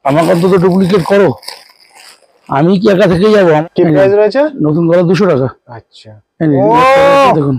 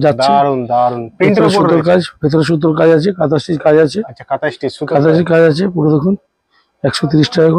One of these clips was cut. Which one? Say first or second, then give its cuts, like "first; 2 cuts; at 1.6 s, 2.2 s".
first; 1 cut; at 3.6 s